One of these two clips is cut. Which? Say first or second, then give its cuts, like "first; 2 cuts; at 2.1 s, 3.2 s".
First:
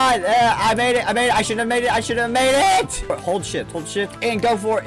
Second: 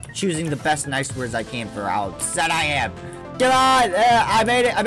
first; 1 cut; at 3.1 s